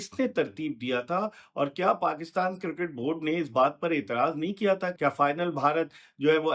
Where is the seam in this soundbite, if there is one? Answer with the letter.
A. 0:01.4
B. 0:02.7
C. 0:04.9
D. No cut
C